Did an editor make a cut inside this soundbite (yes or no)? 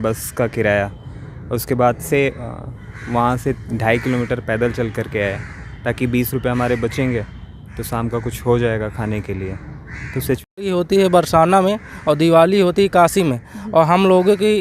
yes